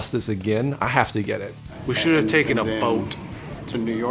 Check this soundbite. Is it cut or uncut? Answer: cut